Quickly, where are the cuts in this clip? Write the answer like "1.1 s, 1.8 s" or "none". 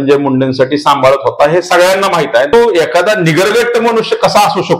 2.5 s